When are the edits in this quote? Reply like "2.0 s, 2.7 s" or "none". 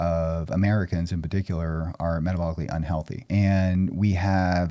3.2 s